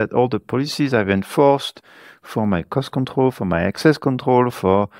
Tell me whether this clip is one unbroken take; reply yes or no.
yes